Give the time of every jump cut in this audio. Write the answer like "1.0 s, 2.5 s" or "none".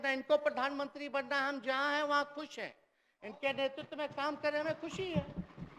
none